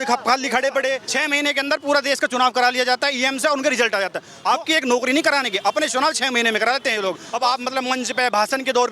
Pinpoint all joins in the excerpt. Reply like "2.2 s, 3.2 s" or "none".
1.1 s, 4.3 s, 7.3 s

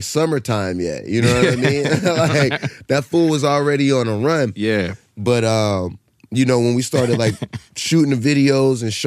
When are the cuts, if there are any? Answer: none

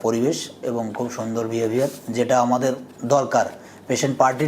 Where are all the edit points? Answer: none

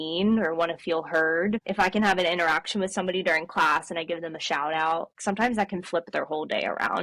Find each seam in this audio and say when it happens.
1.7 s, 5.1 s

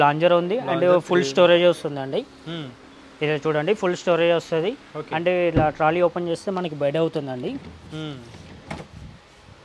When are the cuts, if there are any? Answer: none

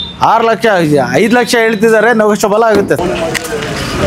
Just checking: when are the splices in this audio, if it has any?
3.0 s

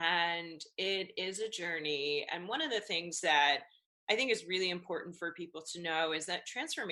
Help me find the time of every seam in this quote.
none

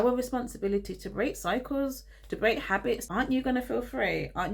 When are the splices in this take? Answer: 3.1 s

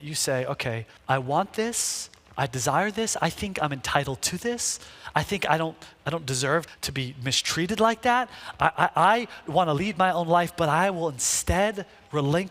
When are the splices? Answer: 0.9 s, 6.8 s

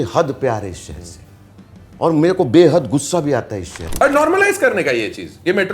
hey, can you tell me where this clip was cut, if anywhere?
3.8 s

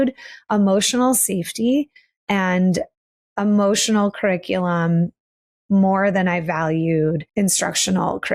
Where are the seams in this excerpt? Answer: 7.3 s

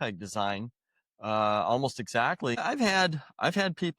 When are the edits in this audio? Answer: 2.6 s

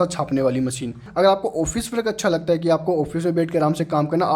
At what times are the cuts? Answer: 1.1 s

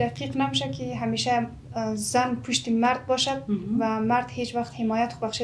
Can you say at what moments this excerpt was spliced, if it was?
none

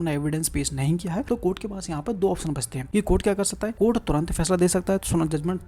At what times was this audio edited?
1.2 s, 2.7 s, 3.7 s

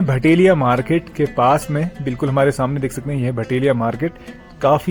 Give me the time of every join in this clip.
none

